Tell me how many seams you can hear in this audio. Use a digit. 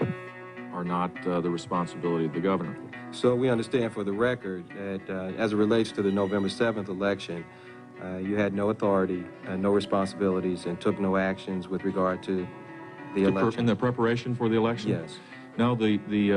1